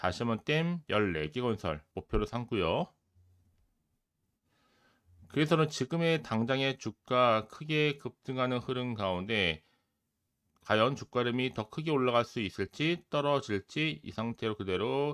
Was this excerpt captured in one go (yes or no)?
no